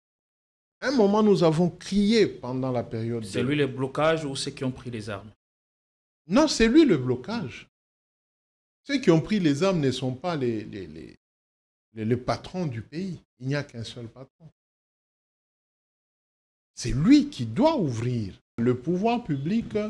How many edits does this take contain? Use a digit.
1